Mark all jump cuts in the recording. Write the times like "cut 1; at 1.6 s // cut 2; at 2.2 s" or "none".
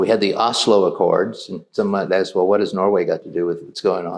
none